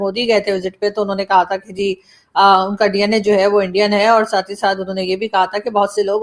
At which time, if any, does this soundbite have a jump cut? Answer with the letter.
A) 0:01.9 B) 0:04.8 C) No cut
C